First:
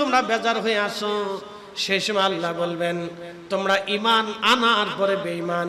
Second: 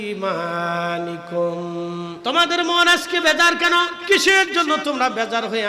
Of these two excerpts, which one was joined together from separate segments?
second; 2 cuts; at 2.1 s, 4.0 s

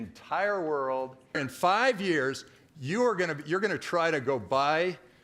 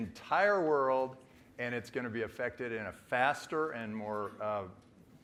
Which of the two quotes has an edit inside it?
first; 1 cut; at 1.4 s

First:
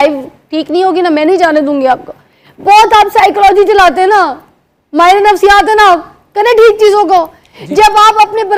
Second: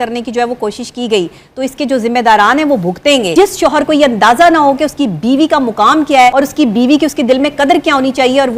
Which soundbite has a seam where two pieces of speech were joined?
second; 2 cuts; at 3.3 s, 6.3 s

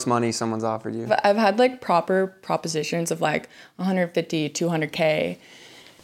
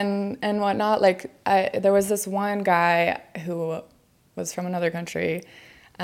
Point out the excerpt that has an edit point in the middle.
first; 1 cut; at 1.0 s

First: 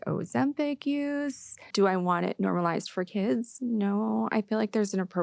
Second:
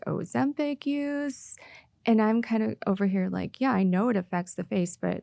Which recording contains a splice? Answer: first; 1 cut; at 1.6 s

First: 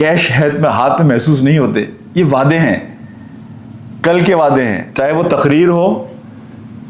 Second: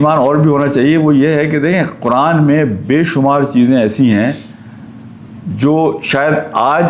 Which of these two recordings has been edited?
first; 1 cut; at 4.9 s

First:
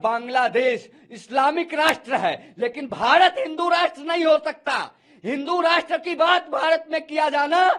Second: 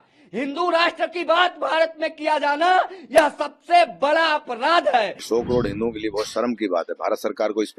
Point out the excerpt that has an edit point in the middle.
second; 1 cut; at 5.2 s

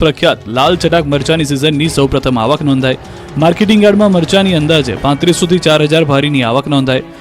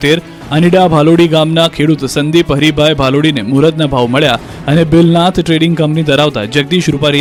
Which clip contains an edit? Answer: first; 1 cut; at 2.8 s

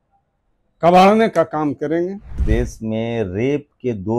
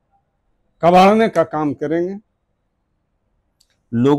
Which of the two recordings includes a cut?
first; 1 cut; at 2.4 s

